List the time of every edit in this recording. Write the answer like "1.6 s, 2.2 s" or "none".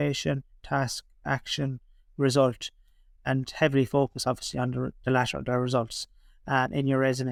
none